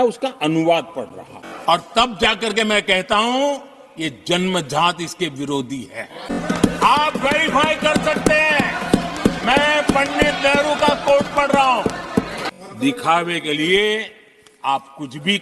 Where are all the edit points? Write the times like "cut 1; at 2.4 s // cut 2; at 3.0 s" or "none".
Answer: cut 1; at 1.5 s // cut 2; at 6.4 s // cut 3; at 12.4 s